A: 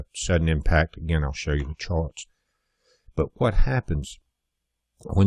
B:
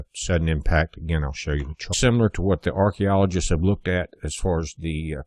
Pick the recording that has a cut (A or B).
A